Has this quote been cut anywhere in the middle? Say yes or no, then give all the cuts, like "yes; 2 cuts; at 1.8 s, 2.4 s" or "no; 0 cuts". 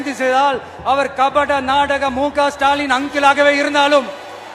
no; 0 cuts